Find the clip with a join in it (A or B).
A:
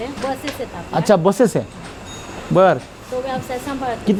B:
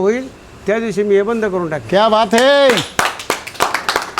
B